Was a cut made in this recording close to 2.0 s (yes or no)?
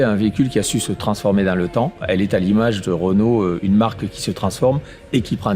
yes